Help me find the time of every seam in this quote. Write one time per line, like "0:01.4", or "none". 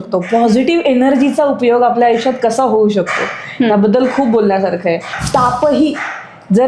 0:05.1